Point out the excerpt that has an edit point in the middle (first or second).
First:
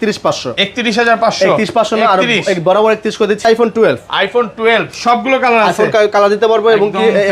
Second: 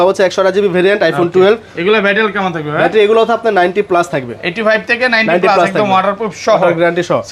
first